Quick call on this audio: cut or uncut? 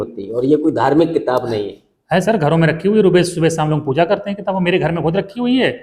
uncut